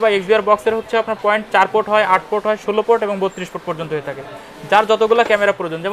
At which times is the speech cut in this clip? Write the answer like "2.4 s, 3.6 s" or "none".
none